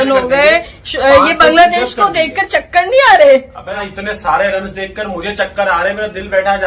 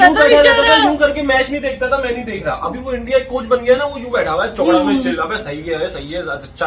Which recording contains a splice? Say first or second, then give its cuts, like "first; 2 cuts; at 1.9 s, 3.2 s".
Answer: first; 1 cut; at 3.9 s